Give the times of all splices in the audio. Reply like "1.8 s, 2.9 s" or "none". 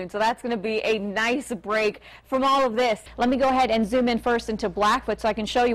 3.1 s